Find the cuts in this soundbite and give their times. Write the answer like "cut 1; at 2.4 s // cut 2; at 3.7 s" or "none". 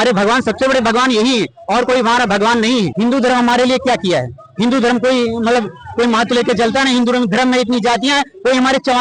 cut 1; at 2.9 s